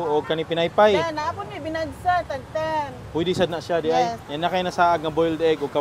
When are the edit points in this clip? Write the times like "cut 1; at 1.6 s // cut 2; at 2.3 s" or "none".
cut 1; at 4.2 s